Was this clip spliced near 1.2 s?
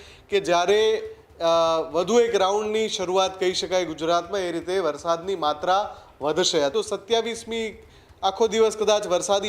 no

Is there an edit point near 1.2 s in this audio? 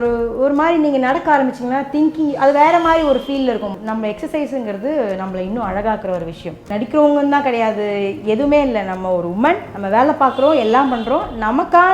no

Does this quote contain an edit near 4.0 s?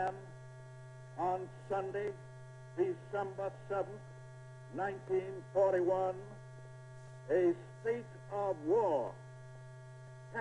yes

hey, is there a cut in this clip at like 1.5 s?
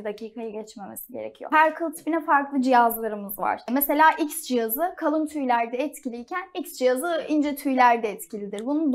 yes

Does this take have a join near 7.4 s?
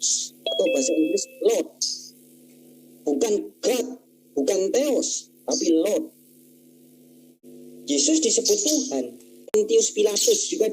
yes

